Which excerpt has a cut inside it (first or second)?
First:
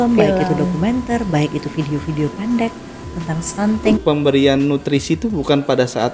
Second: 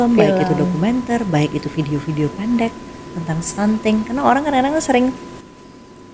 first